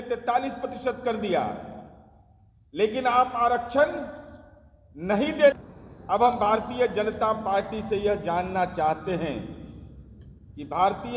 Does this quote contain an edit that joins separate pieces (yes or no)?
yes